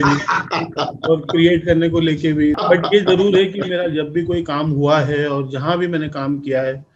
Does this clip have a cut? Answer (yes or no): yes